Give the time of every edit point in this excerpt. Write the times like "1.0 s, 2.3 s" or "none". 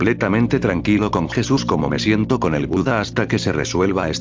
2.8 s